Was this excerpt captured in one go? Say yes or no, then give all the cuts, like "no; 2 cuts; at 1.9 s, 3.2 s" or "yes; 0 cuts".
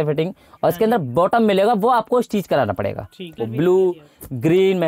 no; 1 cut; at 3.4 s